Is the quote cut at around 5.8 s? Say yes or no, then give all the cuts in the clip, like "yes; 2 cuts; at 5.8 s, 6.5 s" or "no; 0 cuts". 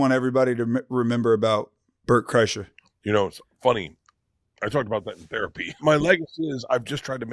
yes; 1 cut; at 5.8 s